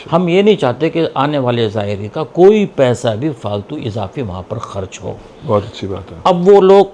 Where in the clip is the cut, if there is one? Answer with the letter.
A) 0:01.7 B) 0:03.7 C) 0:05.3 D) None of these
D